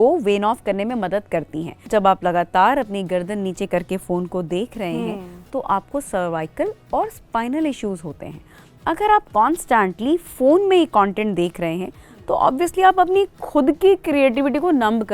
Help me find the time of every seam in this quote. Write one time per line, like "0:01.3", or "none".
0:01.9